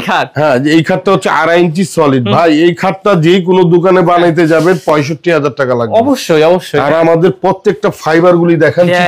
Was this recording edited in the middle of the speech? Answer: no; 0 cuts

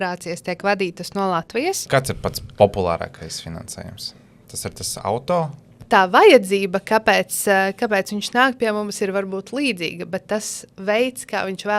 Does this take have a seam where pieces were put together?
yes; 2 cuts; at 1.8 s, 5.8 s

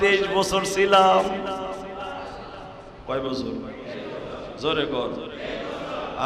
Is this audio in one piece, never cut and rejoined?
yes; 0 cuts

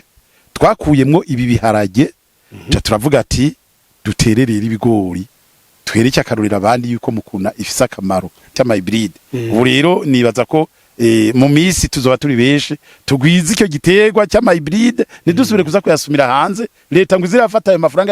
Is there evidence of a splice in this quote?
yes; 1 cut; at 8.5 s

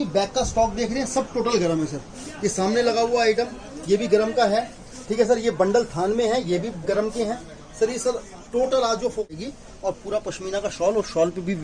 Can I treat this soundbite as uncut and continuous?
no; 1 cut; at 9.3 s

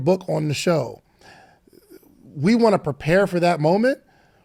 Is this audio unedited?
yes; 0 cuts

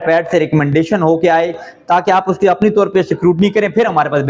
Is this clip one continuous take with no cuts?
yes; 0 cuts

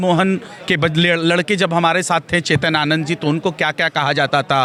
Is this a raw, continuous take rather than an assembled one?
yes; 0 cuts

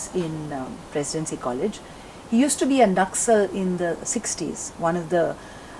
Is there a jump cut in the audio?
no; 0 cuts

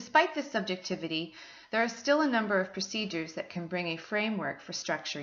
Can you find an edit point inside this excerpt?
no; 0 cuts

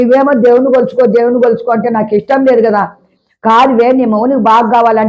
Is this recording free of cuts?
no; 1 cut; at 3.1 s

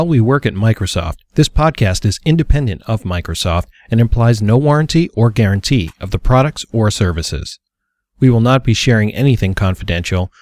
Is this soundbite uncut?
yes; 0 cuts

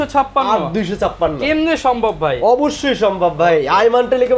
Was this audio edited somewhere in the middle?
no; 0 cuts

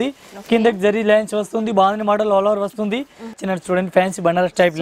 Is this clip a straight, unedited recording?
no; 1 cut; at 3.4 s

